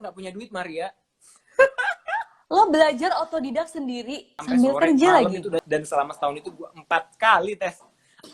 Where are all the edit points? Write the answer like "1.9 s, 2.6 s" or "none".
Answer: 4.3 s, 5.6 s

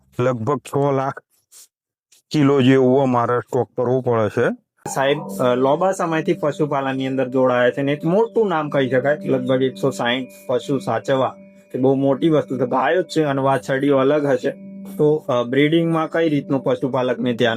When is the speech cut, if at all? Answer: 4.9 s

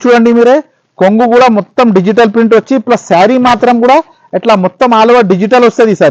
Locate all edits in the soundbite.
none

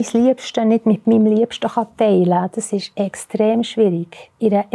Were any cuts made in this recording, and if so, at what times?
none

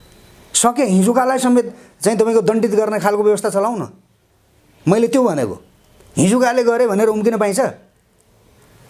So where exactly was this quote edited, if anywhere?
none

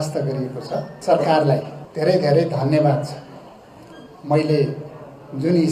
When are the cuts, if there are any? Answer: 0.9 s, 1.8 s

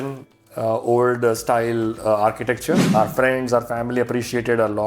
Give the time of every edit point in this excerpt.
2.8 s

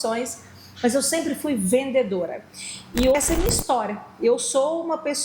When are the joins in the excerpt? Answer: 3.2 s

